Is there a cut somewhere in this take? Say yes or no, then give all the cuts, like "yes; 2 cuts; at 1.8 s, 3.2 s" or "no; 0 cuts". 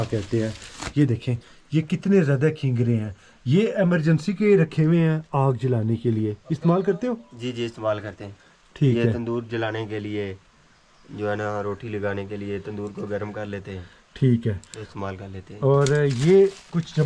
no; 0 cuts